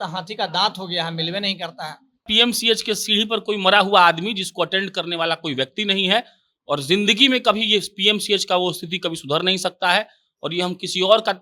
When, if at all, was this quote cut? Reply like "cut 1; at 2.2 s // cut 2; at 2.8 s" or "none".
cut 1; at 2.3 s